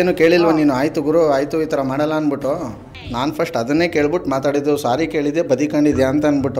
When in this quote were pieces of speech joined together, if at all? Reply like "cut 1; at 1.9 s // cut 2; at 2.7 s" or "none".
cut 1; at 3.0 s